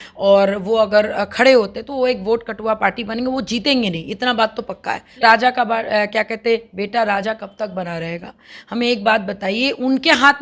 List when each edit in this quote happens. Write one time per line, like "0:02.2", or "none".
0:05.2